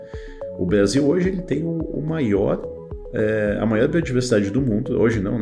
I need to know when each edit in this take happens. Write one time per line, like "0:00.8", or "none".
none